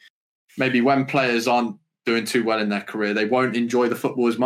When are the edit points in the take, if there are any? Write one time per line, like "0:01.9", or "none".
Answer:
none